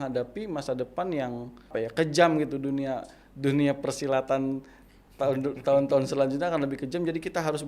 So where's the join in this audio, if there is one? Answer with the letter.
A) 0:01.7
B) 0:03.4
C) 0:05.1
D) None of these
A